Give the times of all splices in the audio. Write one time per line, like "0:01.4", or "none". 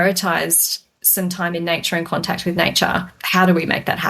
0:03.2